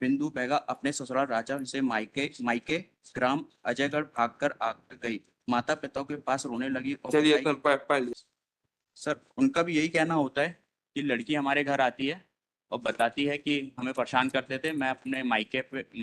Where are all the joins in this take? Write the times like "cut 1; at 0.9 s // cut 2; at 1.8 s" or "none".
cut 1; at 8.2 s